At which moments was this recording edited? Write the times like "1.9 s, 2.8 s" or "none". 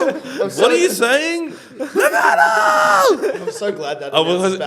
none